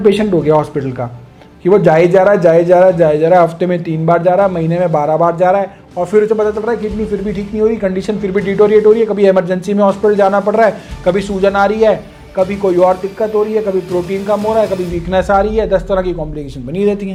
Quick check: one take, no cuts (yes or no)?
yes